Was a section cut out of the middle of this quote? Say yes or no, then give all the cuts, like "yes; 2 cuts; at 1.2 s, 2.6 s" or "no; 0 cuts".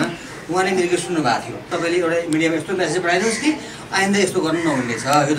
yes; 1 cut; at 1.7 s